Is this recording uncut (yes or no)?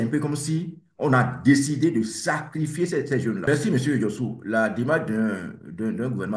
no